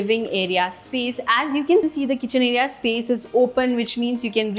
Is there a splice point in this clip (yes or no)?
yes